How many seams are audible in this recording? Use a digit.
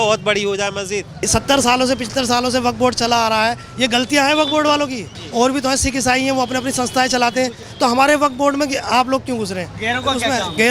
3